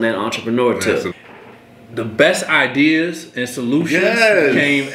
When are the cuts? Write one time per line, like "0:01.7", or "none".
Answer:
0:01.1